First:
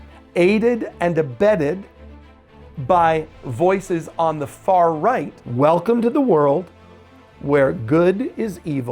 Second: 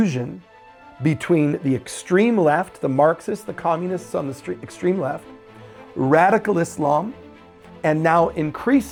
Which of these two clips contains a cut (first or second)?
first